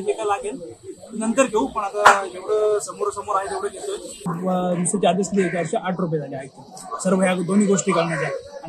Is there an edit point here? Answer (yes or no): yes